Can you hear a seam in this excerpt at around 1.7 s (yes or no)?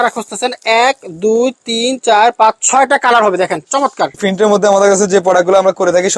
no